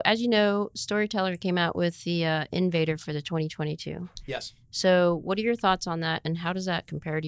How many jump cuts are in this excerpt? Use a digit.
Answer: 0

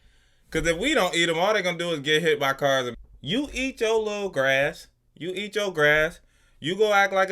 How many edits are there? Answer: 1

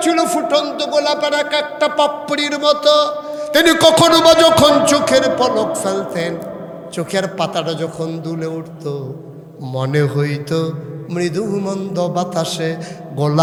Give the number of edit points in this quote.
0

